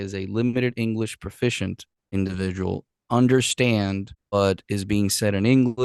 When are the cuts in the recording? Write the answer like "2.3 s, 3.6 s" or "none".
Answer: 2.1 s, 4.3 s